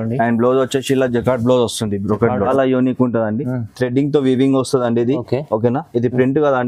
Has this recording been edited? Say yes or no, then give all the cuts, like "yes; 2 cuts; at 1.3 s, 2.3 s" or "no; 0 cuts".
yes; 1 cut; at 2.5 s